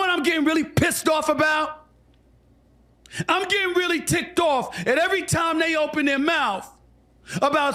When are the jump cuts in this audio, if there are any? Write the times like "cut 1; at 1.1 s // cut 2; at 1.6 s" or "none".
none